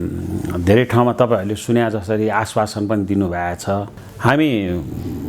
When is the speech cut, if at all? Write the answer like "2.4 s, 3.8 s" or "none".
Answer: 4.0 s